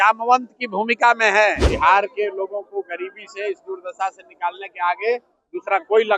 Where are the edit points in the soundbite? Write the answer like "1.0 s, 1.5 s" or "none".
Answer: 1.7 s